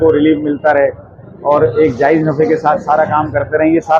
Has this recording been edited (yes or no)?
no